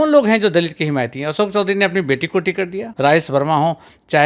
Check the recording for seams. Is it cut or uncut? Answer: cut